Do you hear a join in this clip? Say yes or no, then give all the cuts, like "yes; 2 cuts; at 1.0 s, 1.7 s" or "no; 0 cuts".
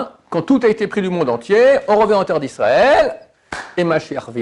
no; 0 cuts